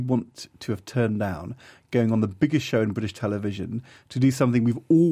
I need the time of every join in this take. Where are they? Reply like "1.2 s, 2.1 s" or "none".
none